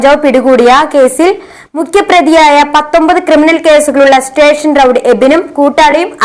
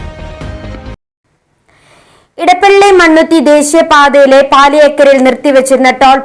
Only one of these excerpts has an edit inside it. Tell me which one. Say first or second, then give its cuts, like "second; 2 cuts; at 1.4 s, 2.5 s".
second; 1 cut; at 1.1 s